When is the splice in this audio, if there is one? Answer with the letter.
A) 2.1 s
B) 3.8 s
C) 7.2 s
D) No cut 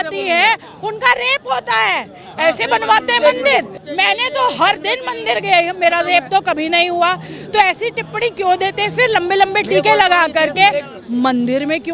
B